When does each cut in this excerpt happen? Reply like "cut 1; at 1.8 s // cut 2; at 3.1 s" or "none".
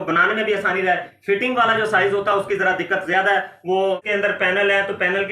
cut 1; at 4.0 s